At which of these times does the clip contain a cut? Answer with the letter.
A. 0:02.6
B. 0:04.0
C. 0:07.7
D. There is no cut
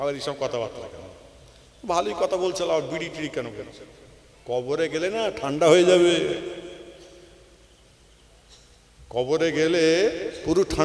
D